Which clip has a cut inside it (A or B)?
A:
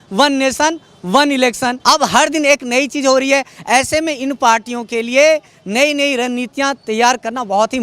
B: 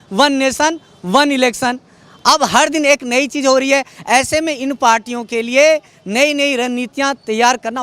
A